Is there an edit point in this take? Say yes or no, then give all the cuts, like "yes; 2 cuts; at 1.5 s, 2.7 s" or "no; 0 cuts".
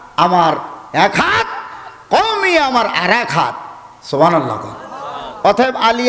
no; 0 cuts